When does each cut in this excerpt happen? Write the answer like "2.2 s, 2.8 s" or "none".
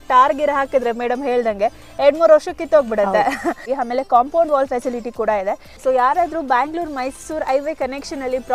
3.6 s, 5.7 s